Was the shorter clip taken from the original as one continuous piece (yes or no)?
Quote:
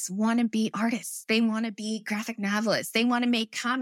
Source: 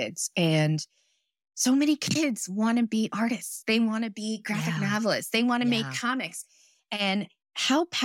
yes